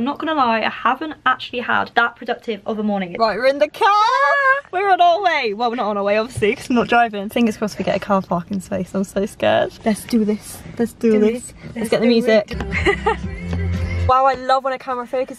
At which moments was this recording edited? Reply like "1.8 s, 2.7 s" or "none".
1.9 s, 3.1 s, 7.2 s, 9.7 s, 12.5 s, 14.1 s